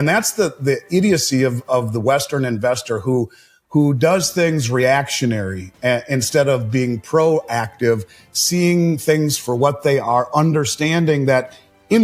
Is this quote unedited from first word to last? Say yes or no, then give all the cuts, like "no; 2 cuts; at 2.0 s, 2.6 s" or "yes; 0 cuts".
yes; 0 cuts